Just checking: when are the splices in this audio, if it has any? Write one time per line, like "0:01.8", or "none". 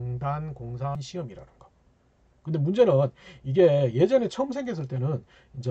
0:01.0